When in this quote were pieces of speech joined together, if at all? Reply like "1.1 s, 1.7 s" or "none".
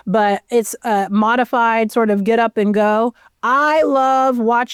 none